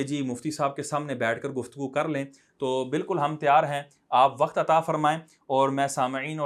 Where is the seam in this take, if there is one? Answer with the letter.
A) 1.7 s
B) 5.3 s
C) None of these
C